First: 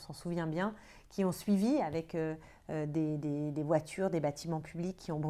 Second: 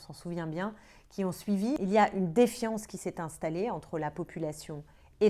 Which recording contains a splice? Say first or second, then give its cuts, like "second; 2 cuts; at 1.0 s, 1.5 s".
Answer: second; 1 cut; at 1.8 s